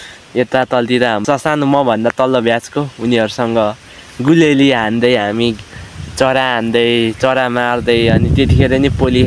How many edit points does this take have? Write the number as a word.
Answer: one